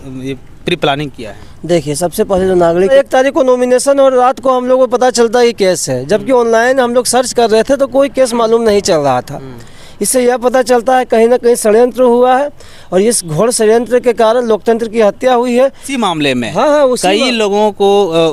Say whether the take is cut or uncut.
cut